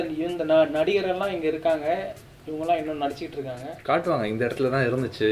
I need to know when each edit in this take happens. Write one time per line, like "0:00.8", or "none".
0:03.7